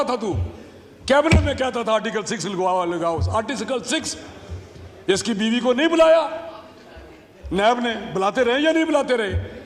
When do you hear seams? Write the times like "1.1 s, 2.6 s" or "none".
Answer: none